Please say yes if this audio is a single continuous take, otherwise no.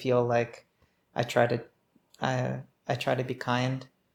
yes